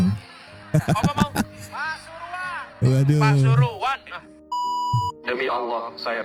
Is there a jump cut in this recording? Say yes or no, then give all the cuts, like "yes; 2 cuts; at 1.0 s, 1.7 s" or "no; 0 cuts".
no; 0 cuts